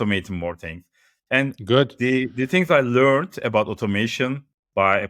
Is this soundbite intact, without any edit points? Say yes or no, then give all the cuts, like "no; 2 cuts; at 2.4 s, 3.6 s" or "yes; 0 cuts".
yes; 0 cuts